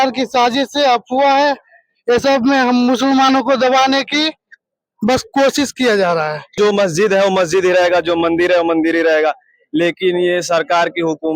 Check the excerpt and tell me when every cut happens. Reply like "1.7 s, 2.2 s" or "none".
6.5 s